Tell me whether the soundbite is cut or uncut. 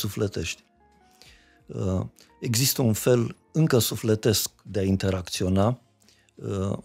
uncut